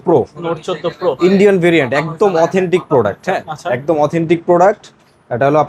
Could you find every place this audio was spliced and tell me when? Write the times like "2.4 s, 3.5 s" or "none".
none